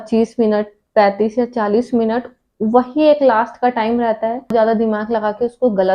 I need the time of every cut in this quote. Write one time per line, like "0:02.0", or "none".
0:04.5